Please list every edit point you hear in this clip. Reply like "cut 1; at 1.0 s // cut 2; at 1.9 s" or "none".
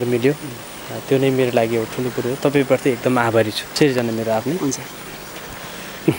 cut 1; at 3.7 s

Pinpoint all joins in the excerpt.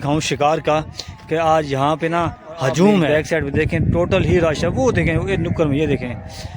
cut 1; at 3.1 s

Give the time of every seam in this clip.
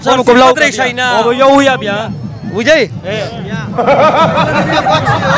none

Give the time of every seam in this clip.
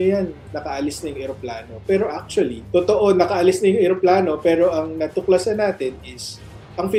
none

